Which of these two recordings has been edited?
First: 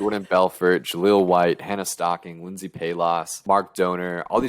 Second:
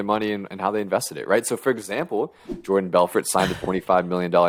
first; 1 cut; at 3.3 s

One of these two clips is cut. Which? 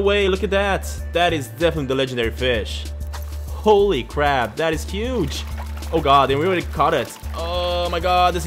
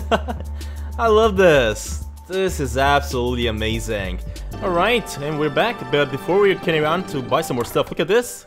second; 1 cut; at 4.5 s

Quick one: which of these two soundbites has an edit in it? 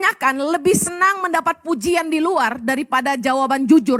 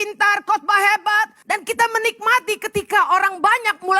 second; 1 cut; at 1.4 s

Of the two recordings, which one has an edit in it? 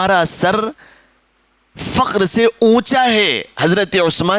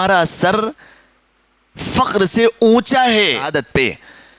second; 1 cut; at 3.5 s

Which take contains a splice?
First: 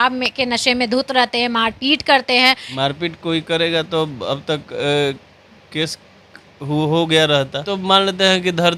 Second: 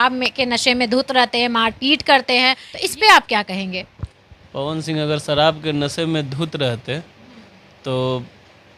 first; 2 cuts; at 2.7 s, 7.6 s

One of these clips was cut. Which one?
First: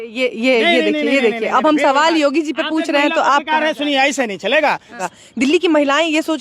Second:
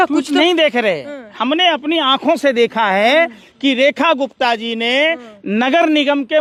first; 1 cut; at 5.0 s

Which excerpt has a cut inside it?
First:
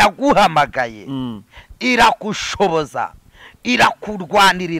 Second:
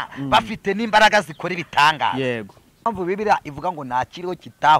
second; 1 cut; at 2.9 s

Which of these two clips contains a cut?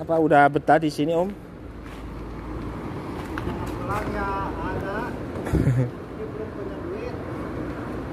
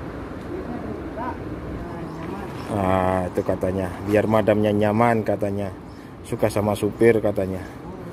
second; 1 cut; at 1.9 s

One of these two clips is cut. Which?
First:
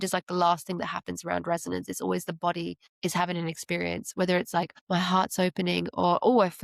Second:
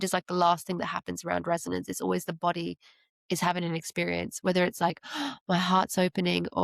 first; 2 cuts; at 2.8 s, 4.8 s

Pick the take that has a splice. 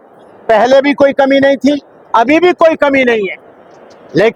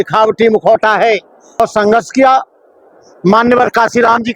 second; 1 cut; at 1.6 s

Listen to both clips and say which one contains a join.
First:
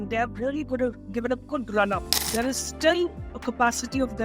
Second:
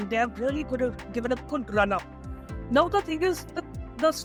first; 1 cut; at 2.3 s

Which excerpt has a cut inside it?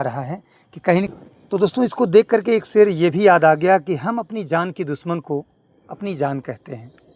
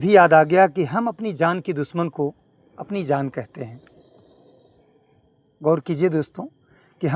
first; 1 cut; at 1.1 s

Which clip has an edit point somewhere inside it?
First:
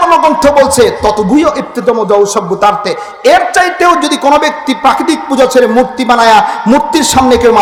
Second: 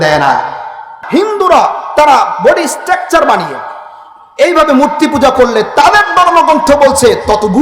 second; 1 cut; at 0.9 s

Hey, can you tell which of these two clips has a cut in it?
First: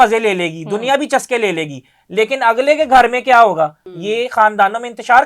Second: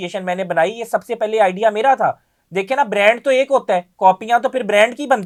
first; 1 cut; at 3.8 s

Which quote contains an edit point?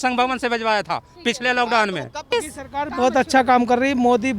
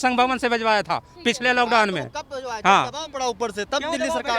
first; 1 cut; at 2.3 s

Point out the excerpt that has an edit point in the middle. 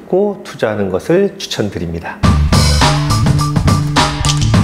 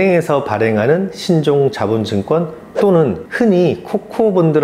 first; 1 cut; at 2.0 s

